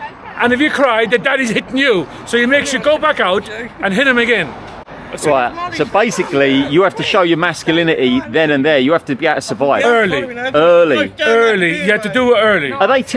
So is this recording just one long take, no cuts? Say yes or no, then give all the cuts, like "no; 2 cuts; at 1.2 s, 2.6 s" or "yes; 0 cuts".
yes; 0 cuts